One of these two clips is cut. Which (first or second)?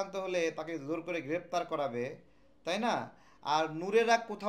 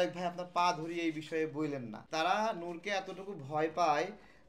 second